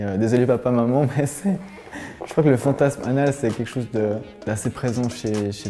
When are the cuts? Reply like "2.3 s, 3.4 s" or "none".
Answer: 4.3 s